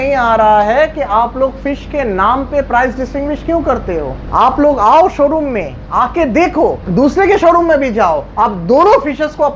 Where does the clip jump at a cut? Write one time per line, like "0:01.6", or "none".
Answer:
0:04.2
0:06.8
0:08.3